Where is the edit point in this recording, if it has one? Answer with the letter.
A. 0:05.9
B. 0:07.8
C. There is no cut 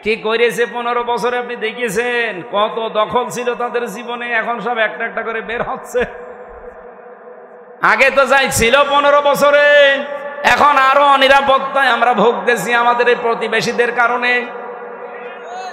B